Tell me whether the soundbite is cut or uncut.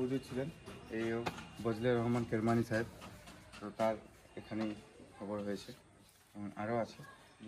uncut